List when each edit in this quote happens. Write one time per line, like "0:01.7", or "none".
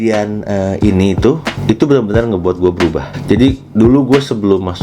0:03.1

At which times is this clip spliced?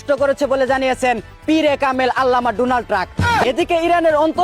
0:03.4

